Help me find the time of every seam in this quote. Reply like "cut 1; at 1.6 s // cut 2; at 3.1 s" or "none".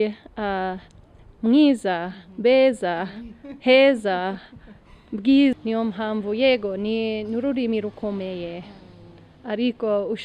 cut 1; at 5.6 s